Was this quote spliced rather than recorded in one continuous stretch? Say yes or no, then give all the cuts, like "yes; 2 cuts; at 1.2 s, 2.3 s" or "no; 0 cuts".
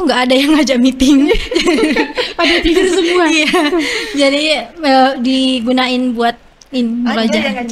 no; 0 cuts